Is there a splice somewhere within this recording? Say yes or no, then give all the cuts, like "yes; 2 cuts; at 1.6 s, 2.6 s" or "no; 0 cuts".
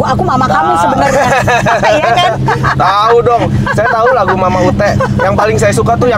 no; 0 cuts